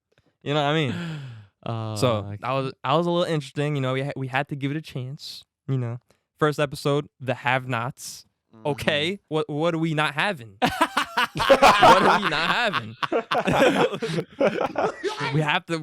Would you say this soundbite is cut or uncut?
cut